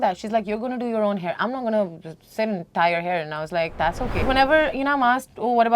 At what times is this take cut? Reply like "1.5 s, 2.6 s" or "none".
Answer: 4.2 s